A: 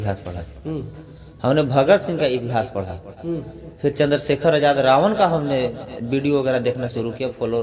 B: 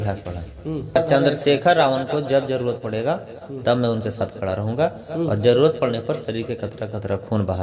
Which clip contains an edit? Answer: B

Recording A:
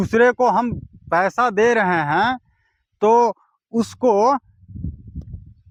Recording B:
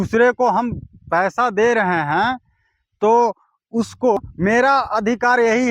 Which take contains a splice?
B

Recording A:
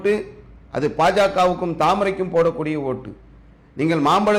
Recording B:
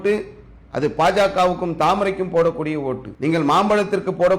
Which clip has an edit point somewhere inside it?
B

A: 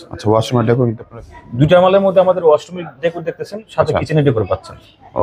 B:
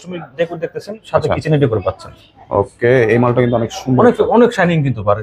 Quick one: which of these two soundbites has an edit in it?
A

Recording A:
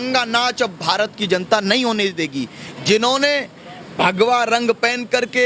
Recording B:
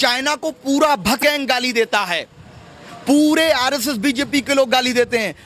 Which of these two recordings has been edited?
B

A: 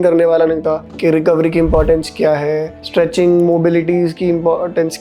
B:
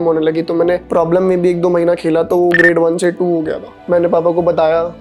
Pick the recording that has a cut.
B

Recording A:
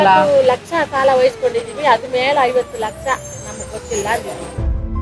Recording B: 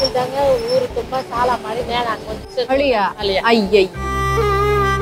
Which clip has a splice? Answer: B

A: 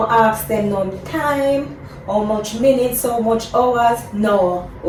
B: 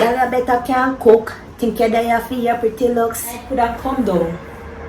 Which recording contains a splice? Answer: B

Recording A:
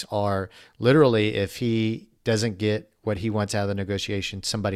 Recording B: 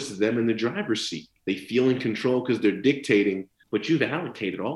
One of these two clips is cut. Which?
B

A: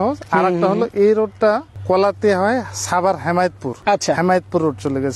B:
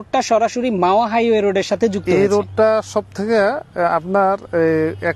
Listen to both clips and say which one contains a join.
A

